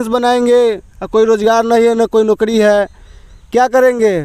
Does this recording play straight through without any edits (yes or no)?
yes